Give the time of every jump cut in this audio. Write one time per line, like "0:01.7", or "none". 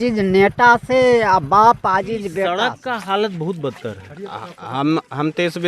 0:02.5